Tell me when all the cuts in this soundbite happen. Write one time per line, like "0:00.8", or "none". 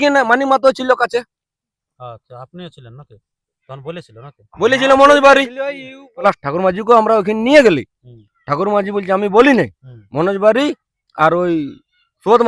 0:06.2